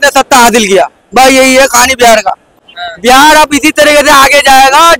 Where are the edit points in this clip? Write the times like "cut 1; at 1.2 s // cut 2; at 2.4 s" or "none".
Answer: cut 1; at 2.7 s